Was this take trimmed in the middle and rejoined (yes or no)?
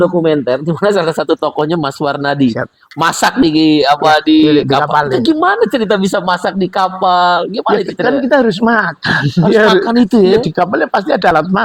no